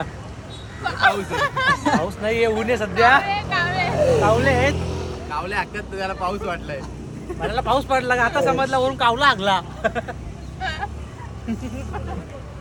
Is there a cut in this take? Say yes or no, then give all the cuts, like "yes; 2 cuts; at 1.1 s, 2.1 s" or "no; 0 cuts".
no; 0 cuts